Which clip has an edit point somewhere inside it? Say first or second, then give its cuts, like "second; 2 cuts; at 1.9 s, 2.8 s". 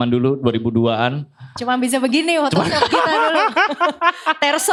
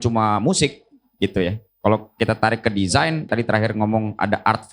second; 1 cut; at 3.3 s